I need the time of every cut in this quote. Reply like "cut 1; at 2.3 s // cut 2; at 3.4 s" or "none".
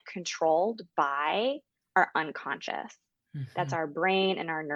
none